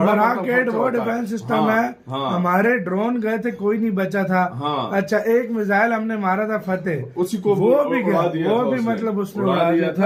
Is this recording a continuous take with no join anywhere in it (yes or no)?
yes